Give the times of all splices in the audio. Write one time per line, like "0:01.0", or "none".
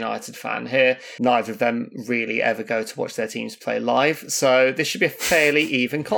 0:01.1